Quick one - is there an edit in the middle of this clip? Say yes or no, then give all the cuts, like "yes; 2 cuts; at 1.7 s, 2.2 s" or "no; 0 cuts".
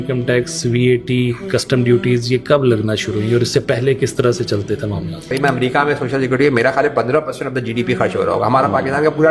yes; 1 cut; at 5.3 s